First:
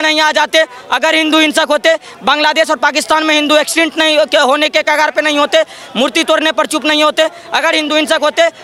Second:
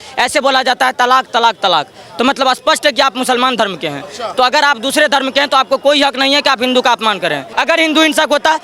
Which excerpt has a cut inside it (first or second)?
second